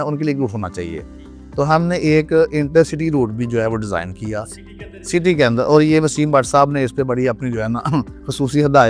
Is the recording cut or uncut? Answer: uncut